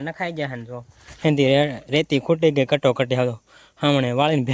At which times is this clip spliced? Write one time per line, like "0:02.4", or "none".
none

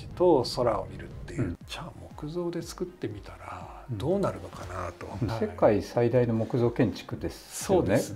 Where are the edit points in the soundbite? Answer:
0:01.6
0:05.3

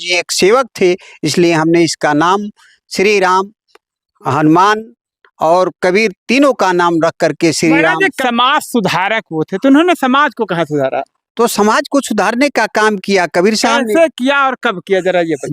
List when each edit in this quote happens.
0:08.2

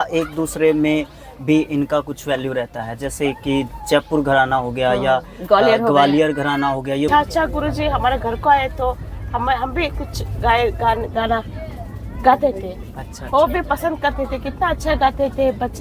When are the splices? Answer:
0:07.1

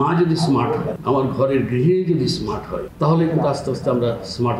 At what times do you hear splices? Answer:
0:00.9
0:02.8

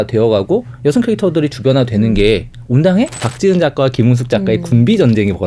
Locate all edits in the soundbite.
0:03.2

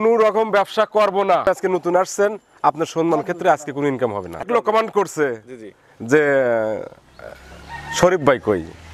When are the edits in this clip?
0:01.5
0:04.5

